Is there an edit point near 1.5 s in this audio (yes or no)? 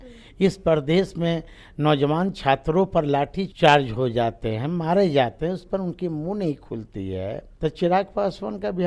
no